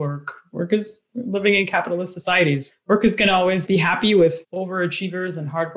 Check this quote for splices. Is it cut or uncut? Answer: uncut